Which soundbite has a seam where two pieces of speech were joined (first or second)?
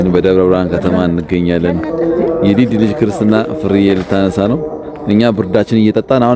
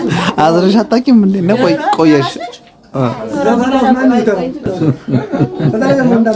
second